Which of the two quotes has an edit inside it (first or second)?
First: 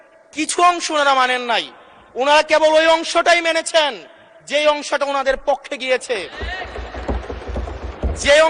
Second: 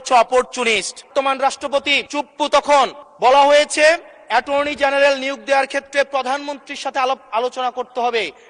second